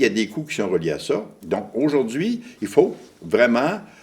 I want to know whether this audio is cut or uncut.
cut